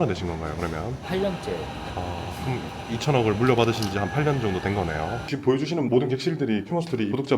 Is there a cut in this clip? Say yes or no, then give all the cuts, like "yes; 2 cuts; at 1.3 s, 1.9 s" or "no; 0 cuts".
yes; 2 cuts; at 1.0 s, 5.2 s